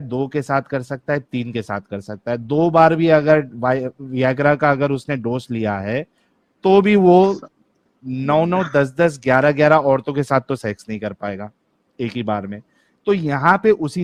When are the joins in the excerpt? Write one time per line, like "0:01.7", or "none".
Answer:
none